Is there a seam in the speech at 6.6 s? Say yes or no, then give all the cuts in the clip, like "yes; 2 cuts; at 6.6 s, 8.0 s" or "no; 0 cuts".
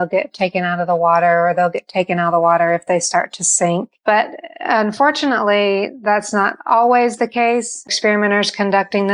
no; 2 cuts; at 3.9 s, 7.9 s